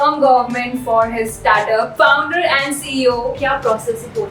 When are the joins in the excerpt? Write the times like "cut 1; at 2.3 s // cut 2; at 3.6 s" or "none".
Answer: cut 1; at 1.9 s // cut 2; at 3.4 s